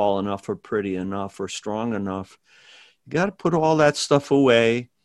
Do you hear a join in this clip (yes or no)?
no